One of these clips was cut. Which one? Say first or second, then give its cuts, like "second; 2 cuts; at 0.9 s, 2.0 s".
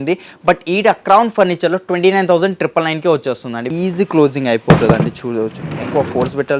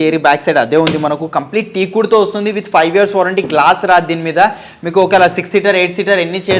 first; 1 cut; at 3.7 s